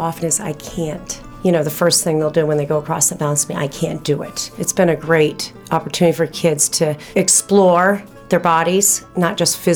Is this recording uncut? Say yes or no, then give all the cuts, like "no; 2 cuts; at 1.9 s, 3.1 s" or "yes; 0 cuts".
no; 4 cuts; at 1.3 s, 4.6 s, 5.5 s, 7.0 s